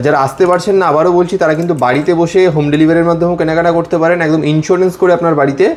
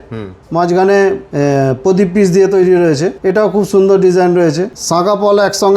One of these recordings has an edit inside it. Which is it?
second; 3 cuts; at 1.2 s, 3.2 s, 4.7 s

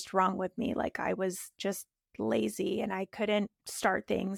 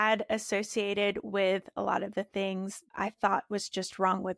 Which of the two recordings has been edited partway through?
second; 1 cut; at 2.8 s

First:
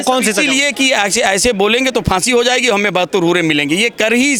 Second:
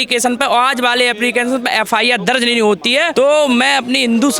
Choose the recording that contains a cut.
second; 1 cut; at 3.1 s

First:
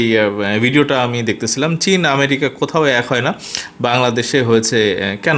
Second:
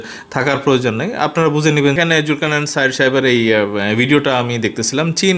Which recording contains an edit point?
second; 1 cut; at 1.9 s

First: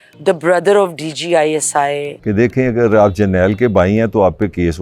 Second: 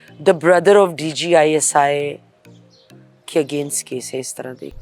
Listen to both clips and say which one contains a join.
first; 1 cut; at 2.1 s

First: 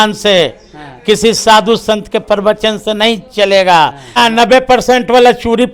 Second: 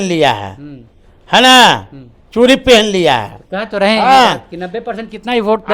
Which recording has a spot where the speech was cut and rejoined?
first; 1 cut; at 4.2 s

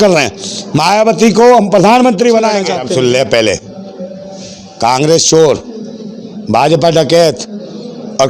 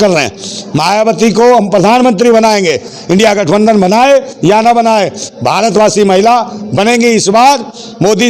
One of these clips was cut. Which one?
first; 1 cut; at 2.7 s

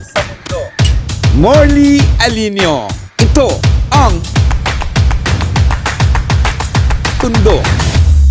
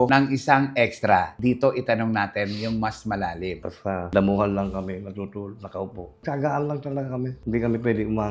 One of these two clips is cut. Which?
second; 2 cuts; at 3.6 s, 7.4 s

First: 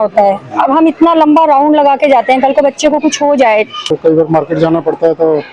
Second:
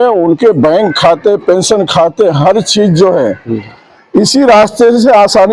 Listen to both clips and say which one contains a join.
first; 1 cut; at 3.9 s

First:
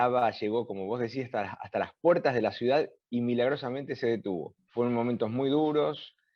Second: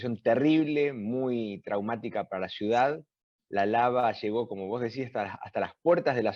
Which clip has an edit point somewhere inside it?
first; 1 cut; at 4.6 s

